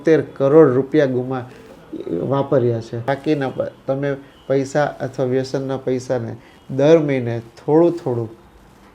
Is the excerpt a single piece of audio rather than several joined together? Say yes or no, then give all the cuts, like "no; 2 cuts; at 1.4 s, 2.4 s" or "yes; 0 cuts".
no; 1 cut; at 3.1 s